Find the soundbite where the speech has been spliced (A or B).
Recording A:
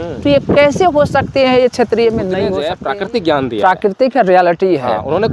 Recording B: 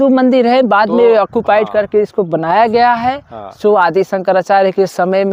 A